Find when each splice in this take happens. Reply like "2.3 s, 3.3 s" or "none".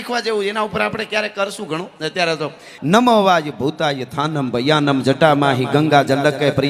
2.7 s